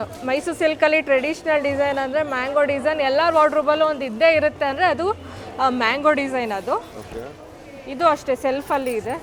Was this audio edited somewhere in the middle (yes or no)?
no